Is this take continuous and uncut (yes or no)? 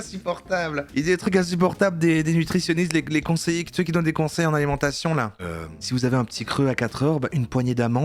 yes